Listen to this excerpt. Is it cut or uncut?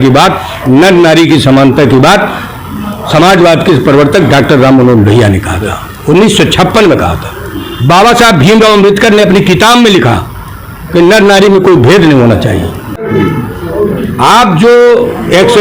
cut